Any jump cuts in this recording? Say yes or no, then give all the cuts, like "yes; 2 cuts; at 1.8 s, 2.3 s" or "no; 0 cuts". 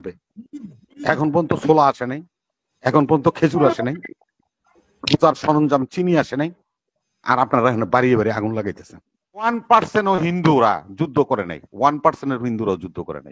yes; 1 cut; at 9.5 s